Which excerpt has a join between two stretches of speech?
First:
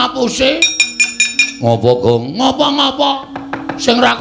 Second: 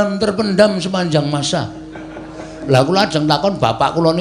second; 1 cut; at 2.6 s

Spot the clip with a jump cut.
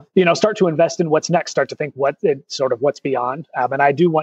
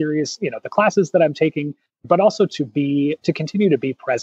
second; 1 cut; at 2.0 s

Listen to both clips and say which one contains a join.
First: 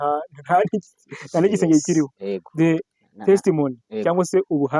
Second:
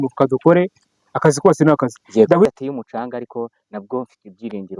second; 1 cut; at 2.5 s

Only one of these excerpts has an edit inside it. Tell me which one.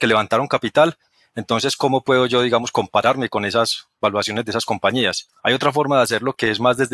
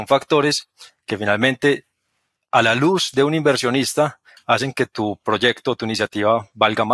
first; 1 cut; at 5.3 s

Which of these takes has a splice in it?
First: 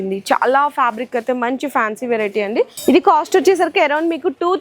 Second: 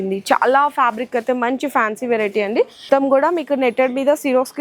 second; 1 cut; at 2.8 s

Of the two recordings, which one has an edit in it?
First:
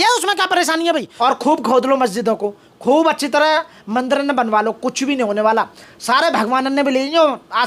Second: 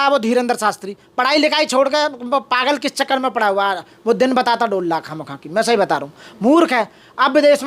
first; 1 cut; at 1.1 s

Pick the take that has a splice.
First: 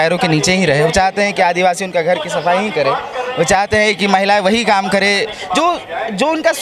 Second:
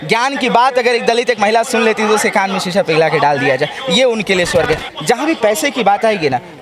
second; 1 cut; at 4.8 s

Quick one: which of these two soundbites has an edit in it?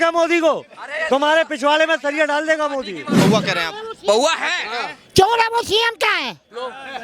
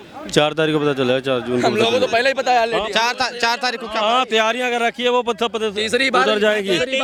first; 1 cut; at 3.2 s

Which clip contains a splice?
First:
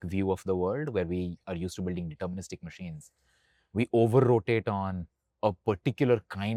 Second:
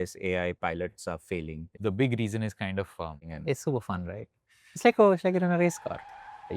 second; 2 cuts; at 1.7 s, 3.3 s

